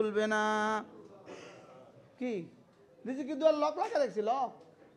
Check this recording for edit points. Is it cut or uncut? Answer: uncut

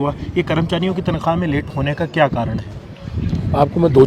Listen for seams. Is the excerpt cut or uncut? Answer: uncut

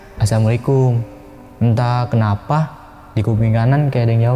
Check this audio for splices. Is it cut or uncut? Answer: uncut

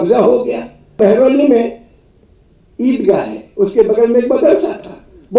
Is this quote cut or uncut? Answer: cut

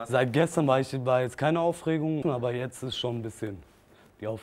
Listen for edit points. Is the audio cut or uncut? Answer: cut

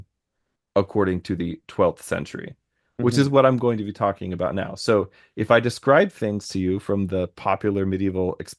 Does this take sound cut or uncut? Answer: uncut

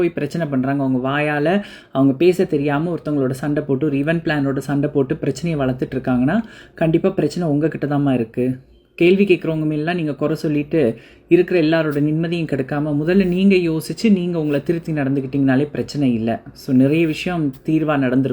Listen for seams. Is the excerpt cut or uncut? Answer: uncut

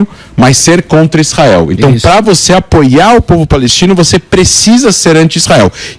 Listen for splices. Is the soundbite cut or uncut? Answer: uncut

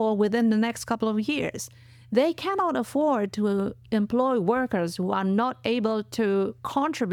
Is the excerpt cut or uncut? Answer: uncut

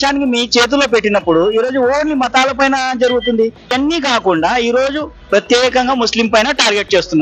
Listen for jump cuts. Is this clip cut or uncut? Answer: cut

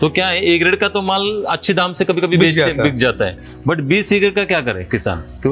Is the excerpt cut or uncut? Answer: uncut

